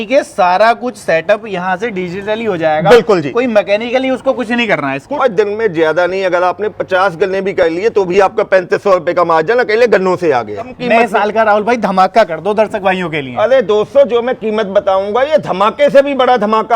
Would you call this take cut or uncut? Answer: cut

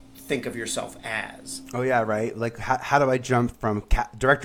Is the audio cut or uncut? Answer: uncut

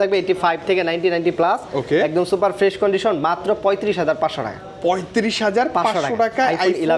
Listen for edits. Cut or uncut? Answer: uncut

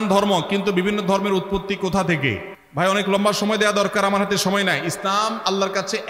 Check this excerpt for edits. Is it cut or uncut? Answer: uncut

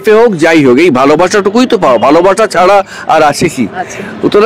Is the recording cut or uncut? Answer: uncut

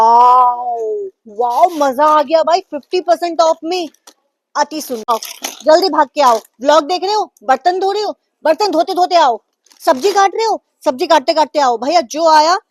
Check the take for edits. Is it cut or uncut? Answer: cut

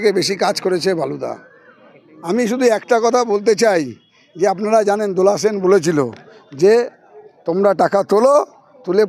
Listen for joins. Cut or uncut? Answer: uncut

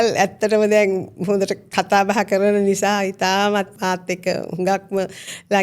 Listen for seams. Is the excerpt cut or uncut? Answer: cut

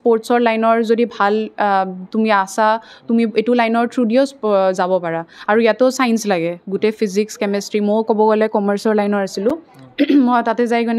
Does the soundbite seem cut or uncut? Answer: uncut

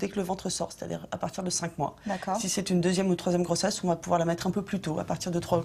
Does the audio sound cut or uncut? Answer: cut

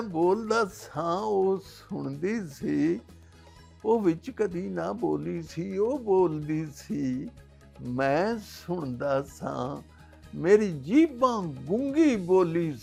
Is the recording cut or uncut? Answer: uncut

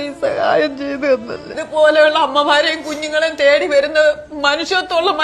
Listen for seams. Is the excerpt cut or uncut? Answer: cut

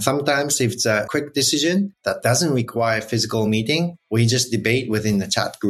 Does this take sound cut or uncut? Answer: cut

